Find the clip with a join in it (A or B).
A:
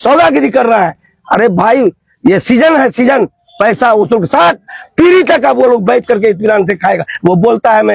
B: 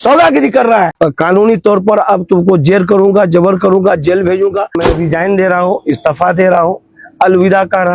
B